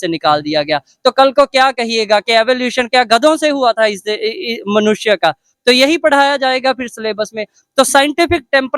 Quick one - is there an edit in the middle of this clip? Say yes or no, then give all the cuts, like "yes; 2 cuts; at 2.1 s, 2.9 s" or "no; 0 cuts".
no; 0 cuts